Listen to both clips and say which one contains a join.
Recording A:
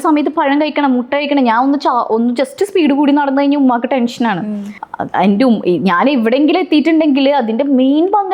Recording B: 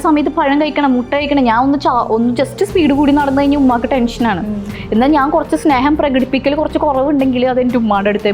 B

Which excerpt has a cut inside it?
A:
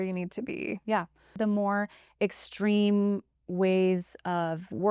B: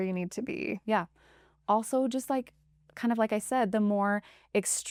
A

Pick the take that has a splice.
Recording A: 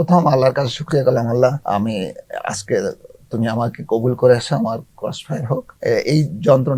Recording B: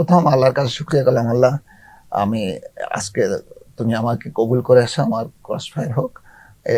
A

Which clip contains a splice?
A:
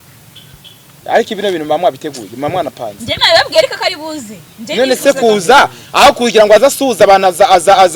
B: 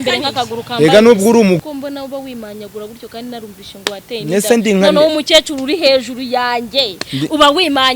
B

